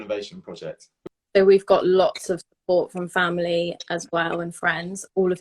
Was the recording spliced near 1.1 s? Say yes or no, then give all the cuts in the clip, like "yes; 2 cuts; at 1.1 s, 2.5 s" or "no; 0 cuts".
yes; 1 cut; at 1.1 s